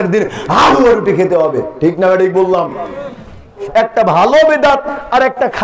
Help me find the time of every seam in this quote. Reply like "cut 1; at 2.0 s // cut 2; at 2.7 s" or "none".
cut 1; at 3.6 s